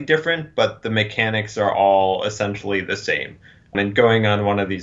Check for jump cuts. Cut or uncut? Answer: cut